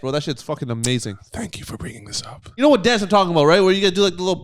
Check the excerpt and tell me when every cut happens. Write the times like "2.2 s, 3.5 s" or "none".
2.5 s